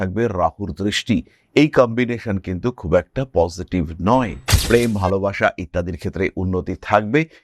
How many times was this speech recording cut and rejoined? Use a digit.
1